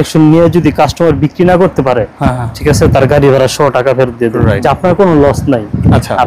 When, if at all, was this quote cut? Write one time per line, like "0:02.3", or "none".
0:04.6

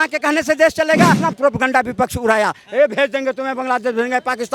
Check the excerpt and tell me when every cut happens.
0:01.2

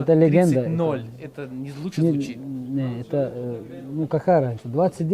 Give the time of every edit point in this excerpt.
none

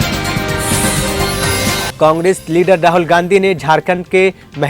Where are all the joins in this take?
0:01.9

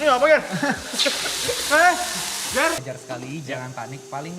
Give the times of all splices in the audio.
0:02.8

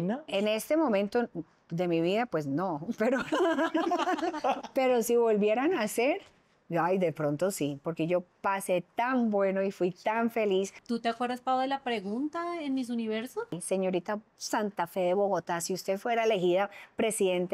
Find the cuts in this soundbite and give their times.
0:04.6
0:10.8
0:13.6

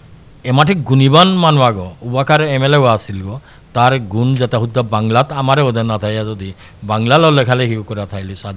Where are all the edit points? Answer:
none

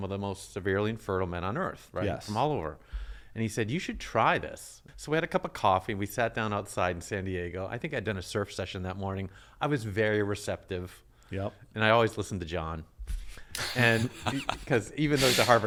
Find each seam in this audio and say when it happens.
none

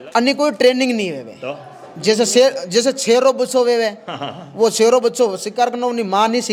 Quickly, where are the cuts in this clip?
none

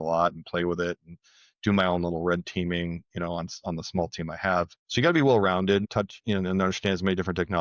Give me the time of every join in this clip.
0:04.8
0:05.9

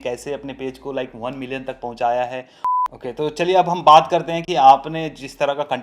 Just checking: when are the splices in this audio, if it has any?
0:02.6

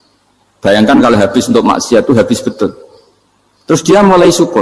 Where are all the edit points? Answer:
none

